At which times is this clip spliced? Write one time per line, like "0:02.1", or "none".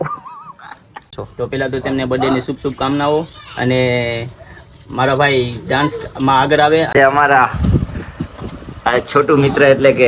0:01.2
0:06.9